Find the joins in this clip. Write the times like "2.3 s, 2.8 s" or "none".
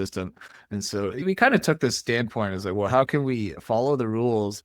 1.2 s